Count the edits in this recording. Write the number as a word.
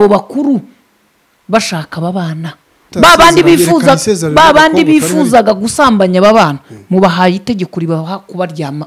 one